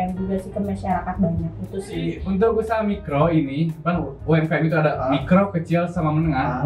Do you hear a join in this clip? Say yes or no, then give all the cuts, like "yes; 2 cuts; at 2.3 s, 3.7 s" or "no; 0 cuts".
yes; 1 cut; at 2.2 s